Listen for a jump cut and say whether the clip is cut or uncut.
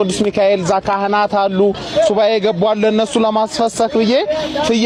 uncut